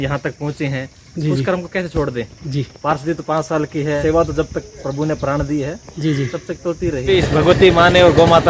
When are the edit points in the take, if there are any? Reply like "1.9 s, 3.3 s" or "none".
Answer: 4.0 s, 7.1 s